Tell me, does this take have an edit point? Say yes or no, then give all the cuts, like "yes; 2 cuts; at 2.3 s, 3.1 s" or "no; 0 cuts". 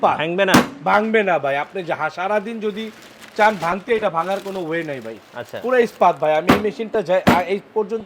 no; 0 cuts